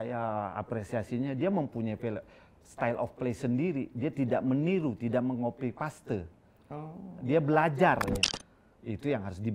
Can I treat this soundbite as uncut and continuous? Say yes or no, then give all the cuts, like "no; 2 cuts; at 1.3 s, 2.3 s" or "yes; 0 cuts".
no; 1 cut; at 8.1 s